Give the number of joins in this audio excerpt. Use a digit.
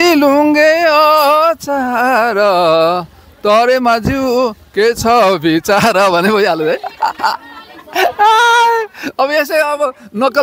0